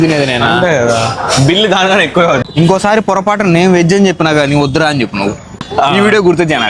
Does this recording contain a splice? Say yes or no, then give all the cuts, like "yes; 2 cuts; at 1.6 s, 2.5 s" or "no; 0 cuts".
yes; 2 cuts; at 2.4 s, 5.6 s